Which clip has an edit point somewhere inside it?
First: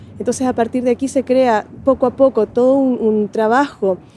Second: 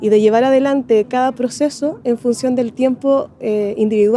first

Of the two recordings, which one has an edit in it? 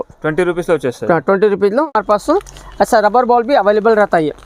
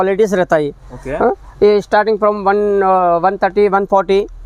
first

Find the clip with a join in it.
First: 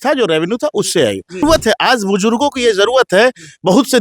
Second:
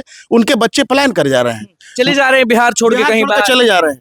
first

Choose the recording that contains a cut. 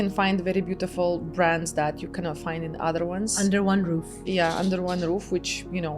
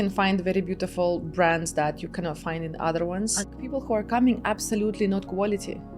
second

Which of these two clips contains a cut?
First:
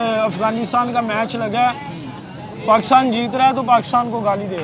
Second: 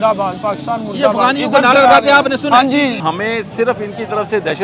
second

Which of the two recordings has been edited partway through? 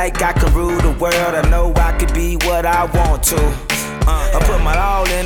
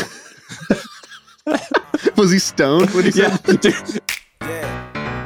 second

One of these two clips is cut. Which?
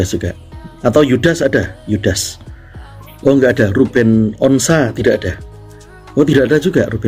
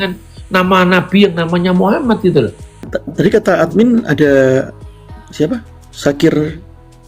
second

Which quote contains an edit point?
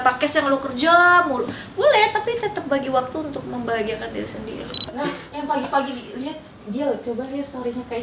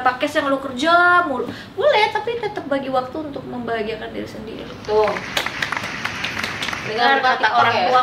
first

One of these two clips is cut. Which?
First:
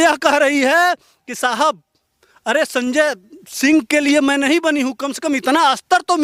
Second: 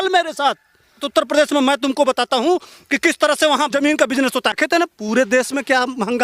second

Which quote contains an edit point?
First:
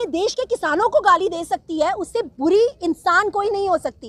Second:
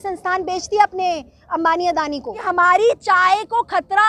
second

